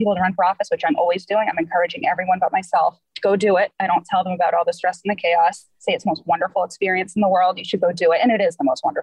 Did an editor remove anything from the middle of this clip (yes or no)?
no